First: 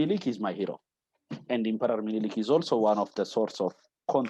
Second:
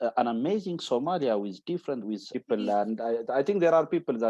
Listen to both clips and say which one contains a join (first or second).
second